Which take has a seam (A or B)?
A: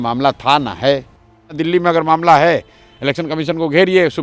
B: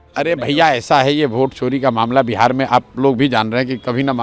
A